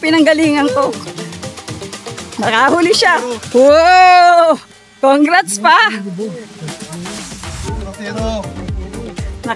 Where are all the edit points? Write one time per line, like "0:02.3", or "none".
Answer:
none